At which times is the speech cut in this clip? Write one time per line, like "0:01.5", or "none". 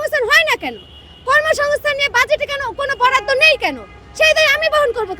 none